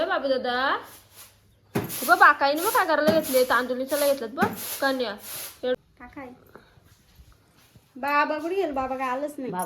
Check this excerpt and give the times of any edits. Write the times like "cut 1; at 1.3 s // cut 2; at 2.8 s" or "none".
cut 1; at 5.8 s